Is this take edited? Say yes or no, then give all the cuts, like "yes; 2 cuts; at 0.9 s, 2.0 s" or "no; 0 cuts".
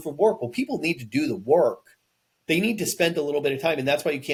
no; 0 cuts